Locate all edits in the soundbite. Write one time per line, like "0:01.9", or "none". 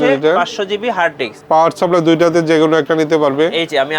0:01.3